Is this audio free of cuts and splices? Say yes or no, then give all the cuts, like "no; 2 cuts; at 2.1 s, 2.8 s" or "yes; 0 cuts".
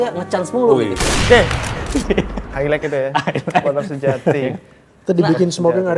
yes; 0 cuts